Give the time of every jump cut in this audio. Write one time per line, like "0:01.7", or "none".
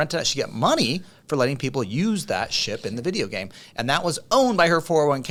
none